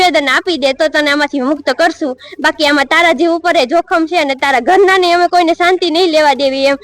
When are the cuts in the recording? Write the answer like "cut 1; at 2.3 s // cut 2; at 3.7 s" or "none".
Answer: none